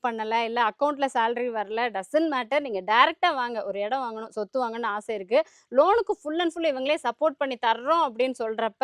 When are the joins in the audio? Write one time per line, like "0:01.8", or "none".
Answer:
none